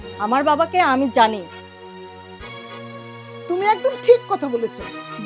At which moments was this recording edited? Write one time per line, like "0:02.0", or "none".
0:01.4
0:03.1